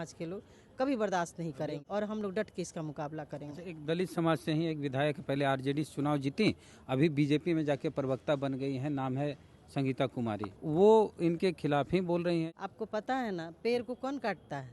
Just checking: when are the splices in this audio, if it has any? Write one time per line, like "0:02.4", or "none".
0:01.8
0:10.5
0:12.4